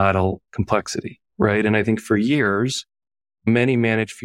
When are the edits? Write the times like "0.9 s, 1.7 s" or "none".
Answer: none